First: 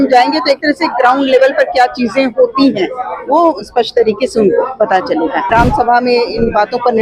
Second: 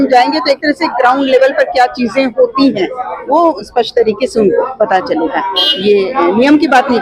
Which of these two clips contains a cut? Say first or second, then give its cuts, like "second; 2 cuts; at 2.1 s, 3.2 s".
first; 1 cut; at 5.5 s